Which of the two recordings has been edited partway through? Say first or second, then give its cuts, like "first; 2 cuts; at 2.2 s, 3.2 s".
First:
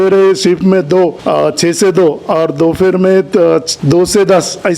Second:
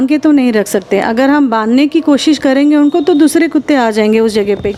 first; 2 cuts; at 1.2 s, 3.7 s